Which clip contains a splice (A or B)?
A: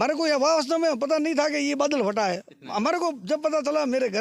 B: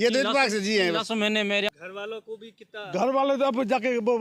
B